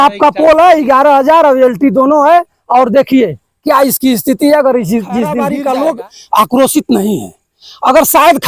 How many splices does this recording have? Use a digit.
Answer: 1